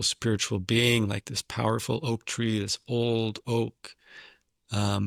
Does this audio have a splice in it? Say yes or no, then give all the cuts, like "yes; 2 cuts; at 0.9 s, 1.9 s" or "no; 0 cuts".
no; 0 cuts